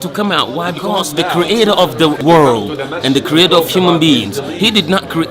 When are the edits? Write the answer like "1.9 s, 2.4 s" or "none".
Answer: 1.0 s, 2.2 s